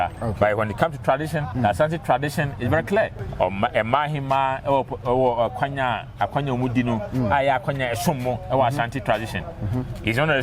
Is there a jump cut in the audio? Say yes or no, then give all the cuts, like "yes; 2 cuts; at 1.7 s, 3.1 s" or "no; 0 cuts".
yes; 2 cuts; at 1.5 s, 3.2 s